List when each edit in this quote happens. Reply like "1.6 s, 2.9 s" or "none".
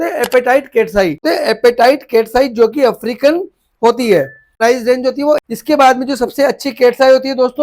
1.2 s, 4.4 s, 5.4 s